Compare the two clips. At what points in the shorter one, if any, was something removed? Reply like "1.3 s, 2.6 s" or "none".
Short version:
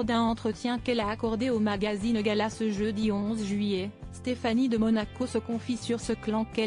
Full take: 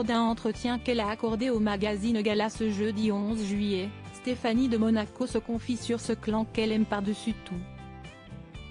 none